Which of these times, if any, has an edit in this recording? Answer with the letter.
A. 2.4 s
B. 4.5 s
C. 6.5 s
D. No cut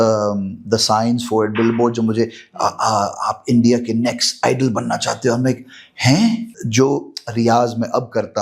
C